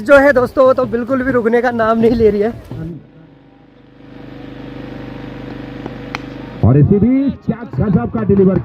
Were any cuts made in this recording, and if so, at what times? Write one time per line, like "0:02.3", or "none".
0:02.9